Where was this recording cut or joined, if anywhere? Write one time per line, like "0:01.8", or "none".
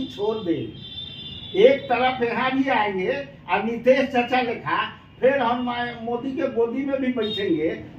none